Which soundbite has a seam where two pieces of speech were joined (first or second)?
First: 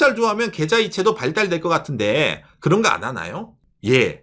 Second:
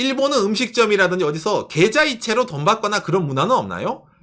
first